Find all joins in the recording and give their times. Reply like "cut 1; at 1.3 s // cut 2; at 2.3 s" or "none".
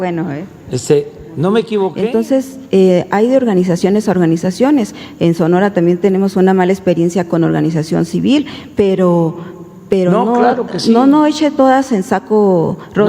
cut 1; at 2.0 s